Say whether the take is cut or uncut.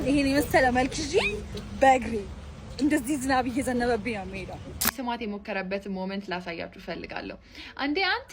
cut